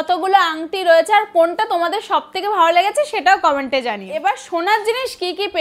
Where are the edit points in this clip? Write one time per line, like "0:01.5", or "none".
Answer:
0:04.1

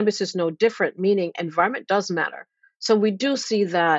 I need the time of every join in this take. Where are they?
none

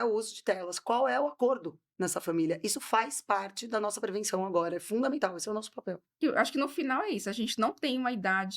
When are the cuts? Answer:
0:06.2

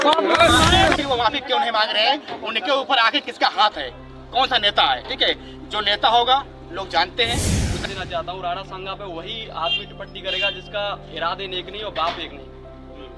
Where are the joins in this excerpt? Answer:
0:00.9
0:07.8

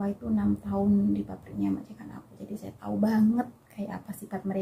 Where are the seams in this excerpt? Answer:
none

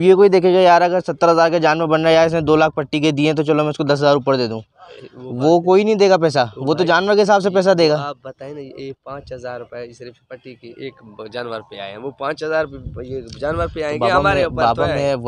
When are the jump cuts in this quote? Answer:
none

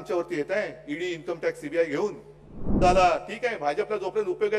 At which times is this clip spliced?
0:02.8

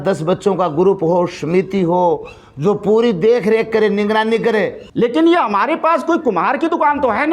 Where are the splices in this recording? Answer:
0:04.8

